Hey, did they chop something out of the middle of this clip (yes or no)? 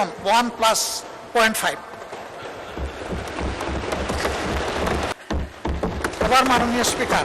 yes